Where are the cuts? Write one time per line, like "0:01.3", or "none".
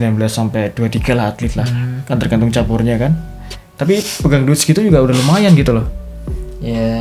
none